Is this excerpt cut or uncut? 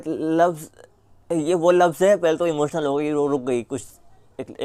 uncut